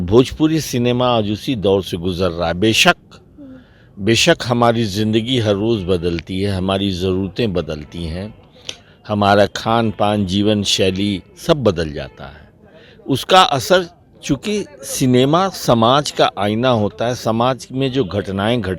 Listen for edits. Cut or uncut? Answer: uncut